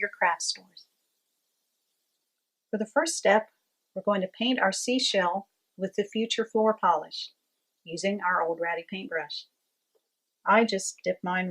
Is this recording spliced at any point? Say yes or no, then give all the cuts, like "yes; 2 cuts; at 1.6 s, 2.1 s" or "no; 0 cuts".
yes; 1 cut; at 9.8 s